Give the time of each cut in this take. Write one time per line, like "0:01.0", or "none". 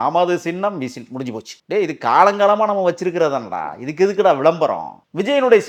none